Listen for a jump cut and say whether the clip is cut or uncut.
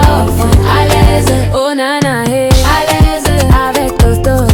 uncut